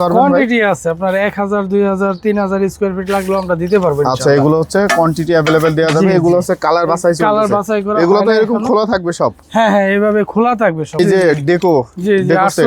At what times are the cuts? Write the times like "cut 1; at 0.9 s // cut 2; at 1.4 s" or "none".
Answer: cut 1; at 11.0 s